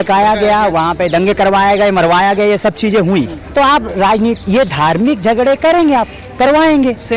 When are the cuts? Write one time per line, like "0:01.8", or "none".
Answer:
0:03.4